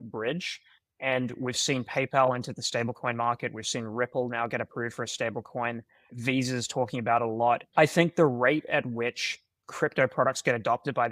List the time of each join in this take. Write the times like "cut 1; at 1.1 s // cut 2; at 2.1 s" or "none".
cut 1; at 6.1 s // cut 2; at 7.7 s